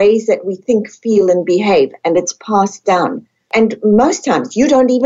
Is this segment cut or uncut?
cut